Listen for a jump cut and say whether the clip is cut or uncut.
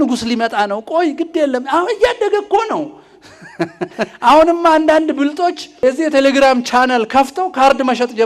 cut